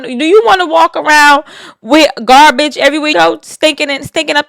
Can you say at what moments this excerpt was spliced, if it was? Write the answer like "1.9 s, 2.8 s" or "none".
3.1 s